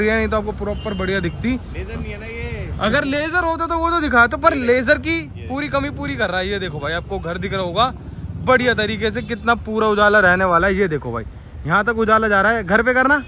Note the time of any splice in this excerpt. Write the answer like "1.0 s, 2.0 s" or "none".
none